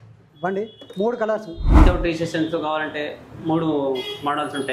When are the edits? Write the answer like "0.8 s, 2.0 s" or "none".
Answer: 1.7 s